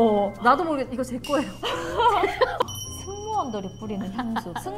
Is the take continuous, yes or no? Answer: no